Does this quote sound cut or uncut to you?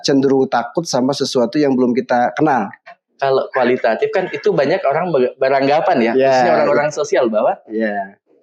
cut